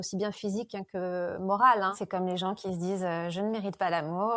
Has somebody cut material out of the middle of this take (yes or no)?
yes